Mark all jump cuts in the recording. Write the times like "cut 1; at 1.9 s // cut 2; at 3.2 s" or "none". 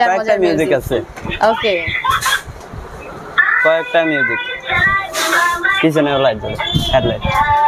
none